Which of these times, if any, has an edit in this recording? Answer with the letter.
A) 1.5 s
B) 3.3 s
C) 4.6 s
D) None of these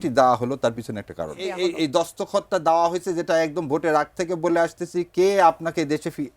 A